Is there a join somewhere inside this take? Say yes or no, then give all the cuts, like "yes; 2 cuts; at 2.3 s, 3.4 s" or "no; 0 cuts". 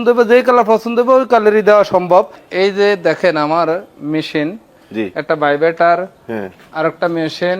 yes; 1 cut; at 2.4 s